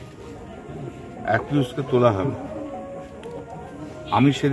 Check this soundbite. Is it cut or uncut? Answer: uncut